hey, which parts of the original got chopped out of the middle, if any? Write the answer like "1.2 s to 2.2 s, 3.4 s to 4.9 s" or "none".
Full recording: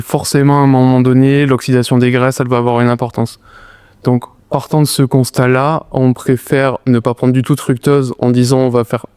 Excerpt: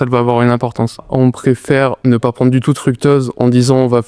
3.4 s to 5.9 s